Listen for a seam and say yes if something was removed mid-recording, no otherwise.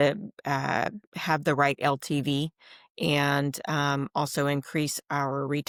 no